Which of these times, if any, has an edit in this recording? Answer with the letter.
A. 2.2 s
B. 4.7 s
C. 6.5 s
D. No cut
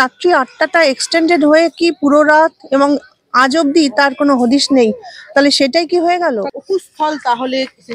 C